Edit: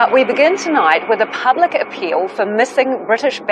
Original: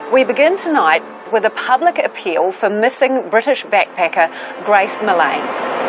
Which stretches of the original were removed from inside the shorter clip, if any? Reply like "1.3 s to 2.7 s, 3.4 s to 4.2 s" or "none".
1.0 s to 1.3 s